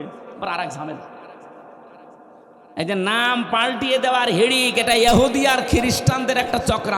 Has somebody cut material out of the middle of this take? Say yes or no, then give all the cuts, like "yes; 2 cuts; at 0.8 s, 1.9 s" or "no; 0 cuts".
no; 0 cuts